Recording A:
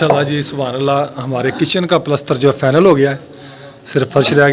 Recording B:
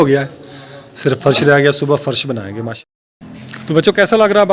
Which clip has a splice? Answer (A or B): B